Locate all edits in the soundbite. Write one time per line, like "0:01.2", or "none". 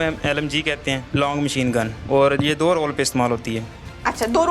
0:01.0